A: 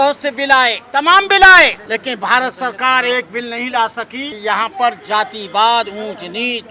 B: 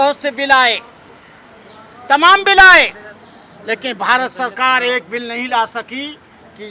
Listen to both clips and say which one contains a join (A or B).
A